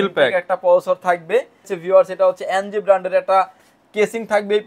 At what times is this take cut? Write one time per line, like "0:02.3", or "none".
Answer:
0:01.8